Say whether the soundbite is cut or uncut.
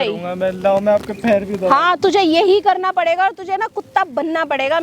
uncut